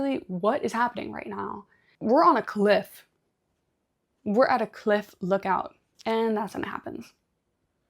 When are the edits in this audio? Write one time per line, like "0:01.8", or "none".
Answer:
0:01.9
0:05.8